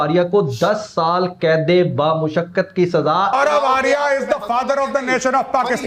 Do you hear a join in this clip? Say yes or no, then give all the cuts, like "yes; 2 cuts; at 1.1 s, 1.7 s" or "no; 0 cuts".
yes; 1 cut; at 3.3 s